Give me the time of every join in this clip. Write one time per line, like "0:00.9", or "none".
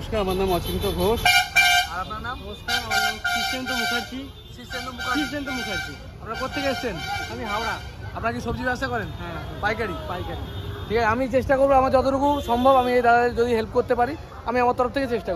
none